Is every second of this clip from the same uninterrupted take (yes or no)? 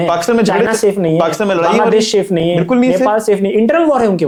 yes